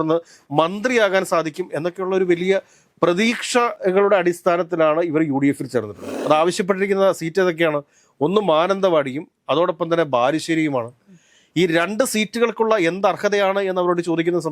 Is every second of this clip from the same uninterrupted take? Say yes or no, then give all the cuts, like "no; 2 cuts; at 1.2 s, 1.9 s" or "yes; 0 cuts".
no; 2 cuts; at 3.8 s, 6.1 s